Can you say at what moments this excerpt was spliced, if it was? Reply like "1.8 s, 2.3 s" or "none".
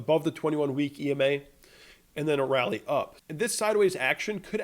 3.2 s